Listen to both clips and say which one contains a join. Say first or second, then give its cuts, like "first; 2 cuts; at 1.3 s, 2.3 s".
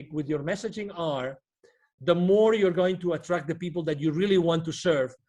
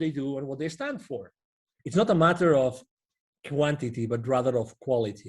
second; 1 cut; at 1.7 s